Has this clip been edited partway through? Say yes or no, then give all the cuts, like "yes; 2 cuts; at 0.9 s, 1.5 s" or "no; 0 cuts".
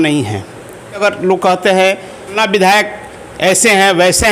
yes; 2 cuts; at 1.2 s, 2.4 s